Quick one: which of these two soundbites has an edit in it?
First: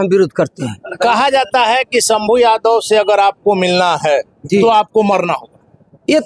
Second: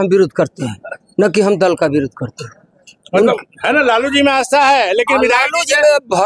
first; 1 cut; at 1.0 s

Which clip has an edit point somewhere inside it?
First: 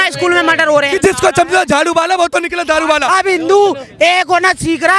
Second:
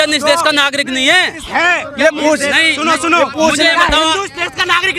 first; 2 cuts; at 0.9 s, 3.1 s

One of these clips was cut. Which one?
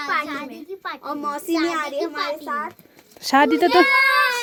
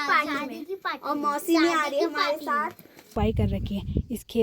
second; 1 cut; at 3.1 s

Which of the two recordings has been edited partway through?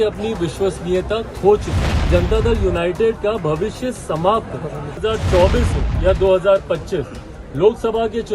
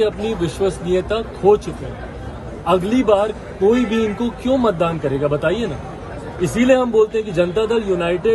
first; 2 cuts; at 2.0 s, 5.0 s

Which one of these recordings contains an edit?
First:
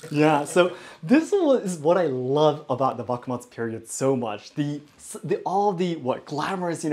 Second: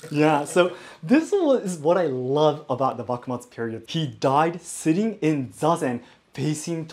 second; 1 cut; at 3.8 s

